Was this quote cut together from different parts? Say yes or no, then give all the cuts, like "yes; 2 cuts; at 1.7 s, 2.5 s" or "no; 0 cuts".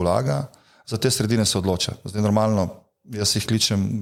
no; 0 cuts